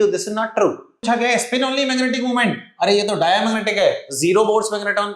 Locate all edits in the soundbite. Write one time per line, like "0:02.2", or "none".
0:01.0